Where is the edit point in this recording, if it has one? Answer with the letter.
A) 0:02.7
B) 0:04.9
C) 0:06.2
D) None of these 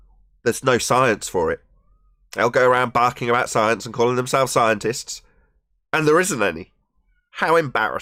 D